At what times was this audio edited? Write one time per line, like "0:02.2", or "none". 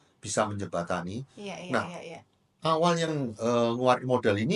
none